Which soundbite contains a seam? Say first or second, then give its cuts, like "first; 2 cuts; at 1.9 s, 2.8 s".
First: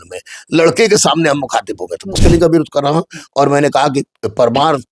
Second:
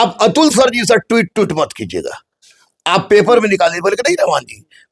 first; 1 cut; at 2.2 s